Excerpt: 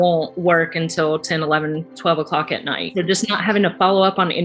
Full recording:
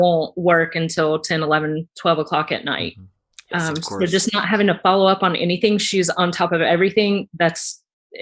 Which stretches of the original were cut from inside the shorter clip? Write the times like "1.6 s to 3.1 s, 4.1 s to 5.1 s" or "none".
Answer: 2.9 s to 3.9 s